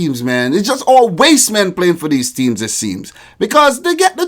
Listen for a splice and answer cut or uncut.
uncut